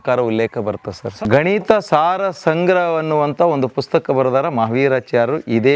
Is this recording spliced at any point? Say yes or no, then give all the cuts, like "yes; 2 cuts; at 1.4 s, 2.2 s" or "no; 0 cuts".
yes; 1 cut; at 1.1 s